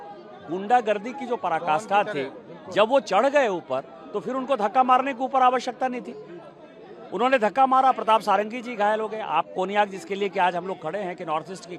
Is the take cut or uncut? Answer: uncut